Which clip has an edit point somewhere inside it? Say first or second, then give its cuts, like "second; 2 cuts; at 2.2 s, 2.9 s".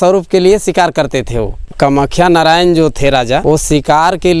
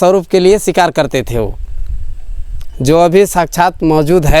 first; 2 cuts; at 1.6 s, 3.4 s